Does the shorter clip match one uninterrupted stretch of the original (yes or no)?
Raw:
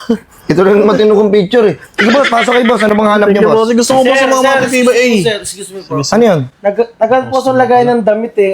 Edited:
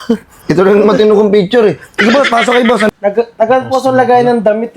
no